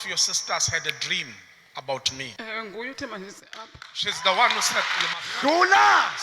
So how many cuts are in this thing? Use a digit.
1